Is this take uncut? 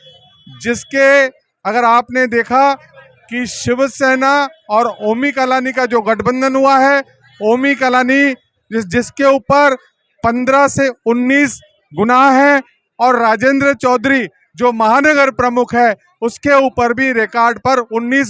yes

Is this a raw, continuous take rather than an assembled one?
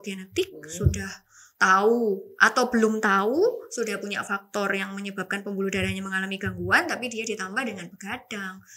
yes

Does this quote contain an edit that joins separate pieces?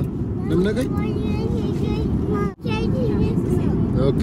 yes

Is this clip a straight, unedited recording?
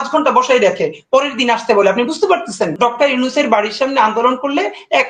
no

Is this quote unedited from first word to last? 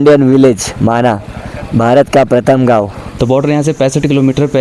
no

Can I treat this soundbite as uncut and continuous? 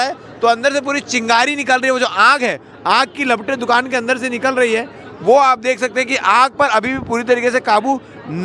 yes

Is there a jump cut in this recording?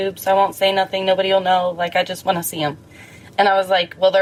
no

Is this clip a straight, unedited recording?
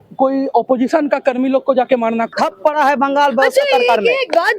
no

